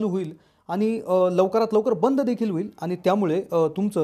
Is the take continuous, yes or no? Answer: yes